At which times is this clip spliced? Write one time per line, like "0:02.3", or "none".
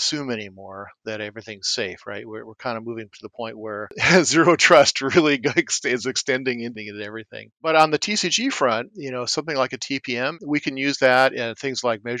0:04.0
0:06.7
0:10.3